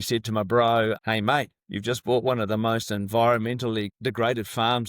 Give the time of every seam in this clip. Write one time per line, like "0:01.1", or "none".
0:01.0